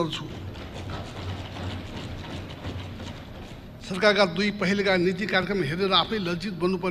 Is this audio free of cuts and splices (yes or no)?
no